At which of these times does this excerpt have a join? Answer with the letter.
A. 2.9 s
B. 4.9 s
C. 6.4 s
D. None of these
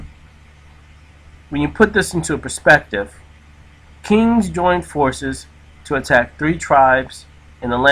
B